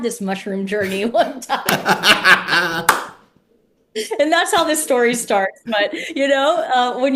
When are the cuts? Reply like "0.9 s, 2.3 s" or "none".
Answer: none